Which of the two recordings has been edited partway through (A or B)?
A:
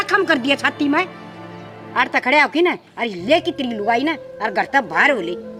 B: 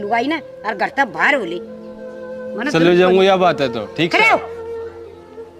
B